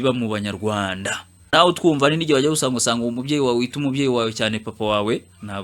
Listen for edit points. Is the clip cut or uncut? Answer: cut